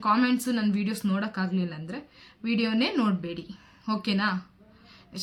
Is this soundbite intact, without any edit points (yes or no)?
yes